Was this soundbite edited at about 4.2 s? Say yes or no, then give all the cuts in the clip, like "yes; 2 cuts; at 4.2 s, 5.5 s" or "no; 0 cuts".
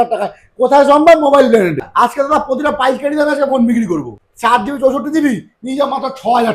yes; 2 cuts; at 1.9 s, 4.2 s